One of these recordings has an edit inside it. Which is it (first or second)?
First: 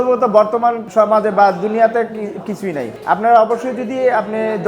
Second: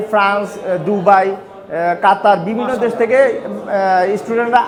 first